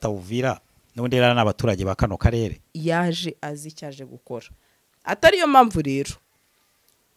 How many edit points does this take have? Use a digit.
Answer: 1